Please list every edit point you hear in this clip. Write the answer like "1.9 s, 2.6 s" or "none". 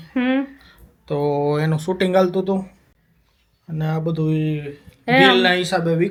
none

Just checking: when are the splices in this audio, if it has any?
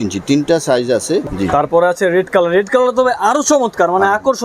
1.2 s

